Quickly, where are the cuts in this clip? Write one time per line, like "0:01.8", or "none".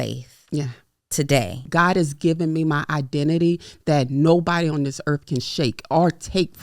0:01.7